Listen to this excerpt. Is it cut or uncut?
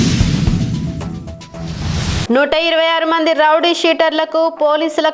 uncut